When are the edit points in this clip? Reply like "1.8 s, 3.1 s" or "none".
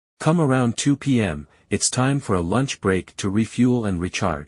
1.5 s